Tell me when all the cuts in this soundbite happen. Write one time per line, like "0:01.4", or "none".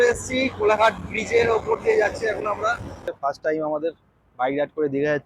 0:03.1